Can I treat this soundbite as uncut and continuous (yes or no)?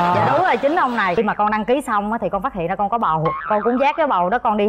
no